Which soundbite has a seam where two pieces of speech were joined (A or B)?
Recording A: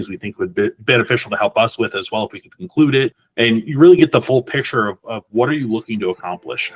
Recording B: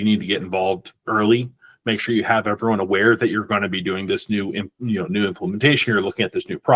A